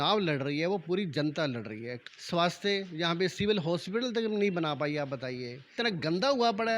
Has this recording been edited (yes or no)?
yes